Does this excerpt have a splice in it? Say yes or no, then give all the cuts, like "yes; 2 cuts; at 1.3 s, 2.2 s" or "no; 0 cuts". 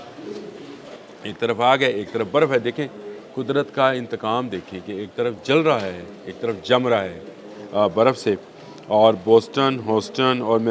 no; 0 cuts